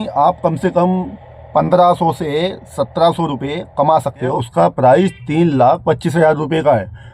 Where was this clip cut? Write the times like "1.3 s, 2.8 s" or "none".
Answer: 4.2 s